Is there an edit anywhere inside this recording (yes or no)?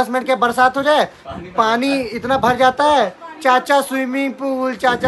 no